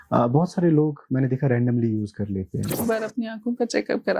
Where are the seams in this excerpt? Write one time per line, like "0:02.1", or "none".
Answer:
0:02.8